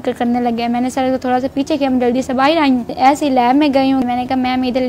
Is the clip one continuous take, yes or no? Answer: no